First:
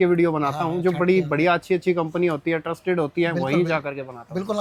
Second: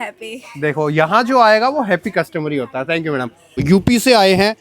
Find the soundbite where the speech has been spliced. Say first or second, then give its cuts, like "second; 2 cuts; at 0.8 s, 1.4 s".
second; 1 cut; at 3.6 s